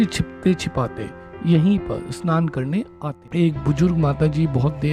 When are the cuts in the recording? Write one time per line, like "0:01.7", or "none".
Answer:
0:03.0